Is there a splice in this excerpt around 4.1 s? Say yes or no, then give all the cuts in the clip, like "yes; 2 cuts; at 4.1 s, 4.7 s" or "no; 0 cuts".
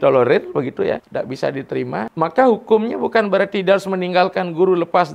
no; 2 cuts; at 1.0 s, 2.1 s